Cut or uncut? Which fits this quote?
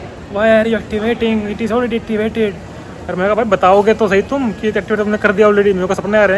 uncut